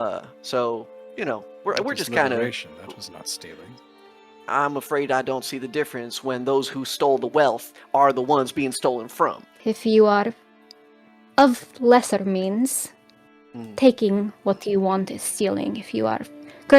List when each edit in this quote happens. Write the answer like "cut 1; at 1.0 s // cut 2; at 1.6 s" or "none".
cut 1; at 9.5 s